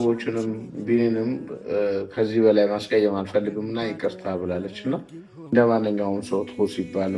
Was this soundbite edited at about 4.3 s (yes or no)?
no